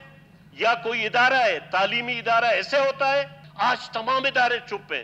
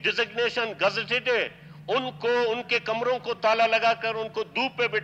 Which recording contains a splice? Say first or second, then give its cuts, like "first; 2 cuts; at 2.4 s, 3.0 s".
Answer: first; 1 cut; at 3.4 s